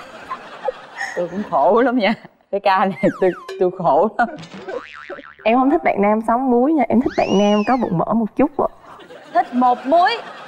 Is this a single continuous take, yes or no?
yes